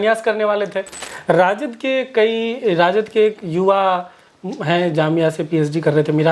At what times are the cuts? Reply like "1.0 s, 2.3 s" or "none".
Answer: 1.0 s